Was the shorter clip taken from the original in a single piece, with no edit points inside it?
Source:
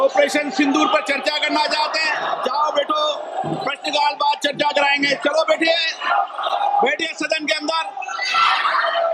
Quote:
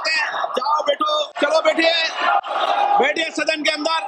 no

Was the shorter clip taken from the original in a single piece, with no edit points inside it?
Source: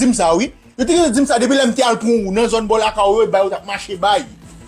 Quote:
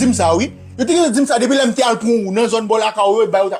yes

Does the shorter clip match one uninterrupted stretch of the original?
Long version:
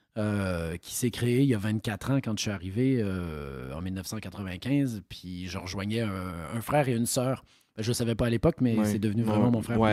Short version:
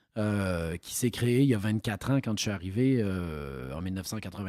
yes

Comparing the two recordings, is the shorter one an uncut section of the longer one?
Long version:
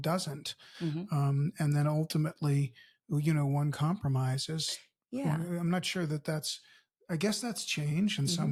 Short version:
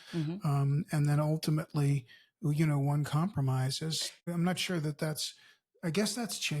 no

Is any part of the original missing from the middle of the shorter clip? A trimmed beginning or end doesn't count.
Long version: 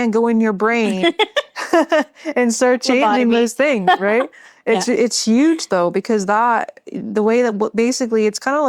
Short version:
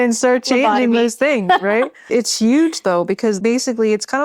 yes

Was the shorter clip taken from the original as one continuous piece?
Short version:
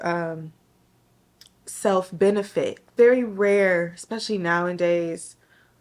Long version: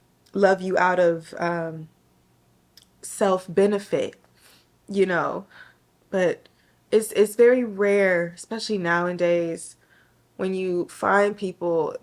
no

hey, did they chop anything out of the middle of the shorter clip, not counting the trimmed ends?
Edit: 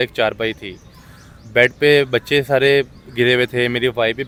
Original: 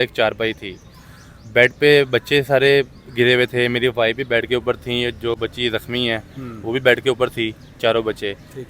no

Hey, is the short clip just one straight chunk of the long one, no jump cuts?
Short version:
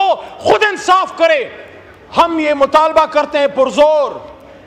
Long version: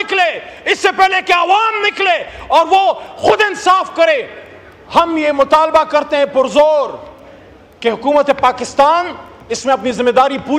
yes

